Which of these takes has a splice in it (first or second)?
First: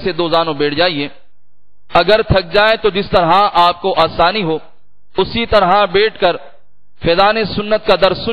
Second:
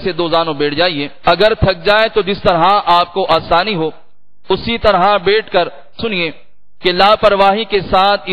second